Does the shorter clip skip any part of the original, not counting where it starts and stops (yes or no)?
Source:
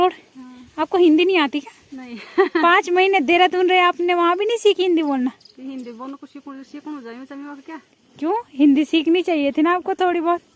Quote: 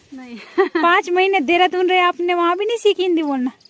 no